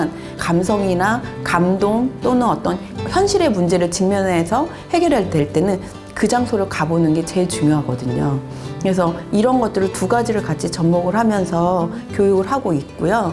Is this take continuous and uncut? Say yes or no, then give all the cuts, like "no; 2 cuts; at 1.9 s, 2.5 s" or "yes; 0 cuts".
yes; 0 cuts